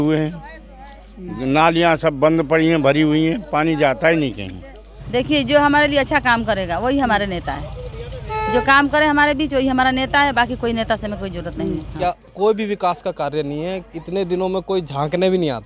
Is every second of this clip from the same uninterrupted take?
no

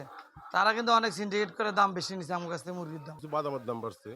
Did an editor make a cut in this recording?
yes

